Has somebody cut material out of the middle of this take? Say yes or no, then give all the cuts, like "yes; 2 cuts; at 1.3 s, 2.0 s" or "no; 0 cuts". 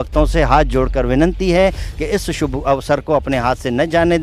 no; 0 cuts